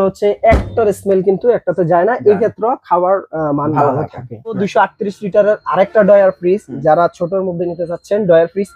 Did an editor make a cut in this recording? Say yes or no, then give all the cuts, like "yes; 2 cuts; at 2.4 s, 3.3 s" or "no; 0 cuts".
yes; 1 cut; at 4.6 s